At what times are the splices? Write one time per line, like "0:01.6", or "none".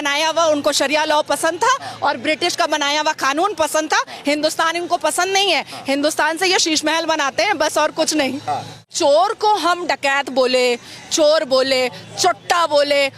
0:08.9